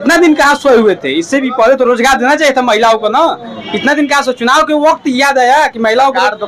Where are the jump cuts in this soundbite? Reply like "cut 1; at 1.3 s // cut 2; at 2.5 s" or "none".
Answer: none

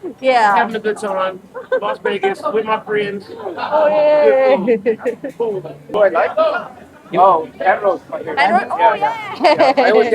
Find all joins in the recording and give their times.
cut 1; at 5.8 s

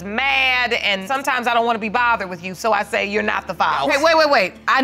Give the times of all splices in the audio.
cut 1; at 1.0 s // cut 2; at 3.8 s

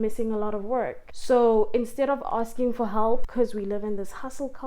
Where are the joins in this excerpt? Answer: cut 1; at 1.1 s

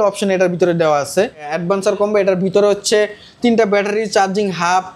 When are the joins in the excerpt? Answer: cut 1; at 1.5 s

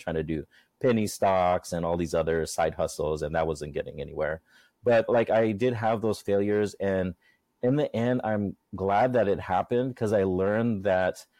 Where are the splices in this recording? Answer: cut 1; at 8.6 s

